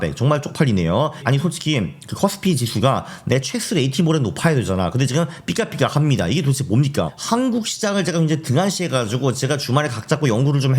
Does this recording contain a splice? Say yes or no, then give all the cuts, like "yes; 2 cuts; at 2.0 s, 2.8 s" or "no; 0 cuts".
yes; 2 cuts; at 1.2 s, 7.1 s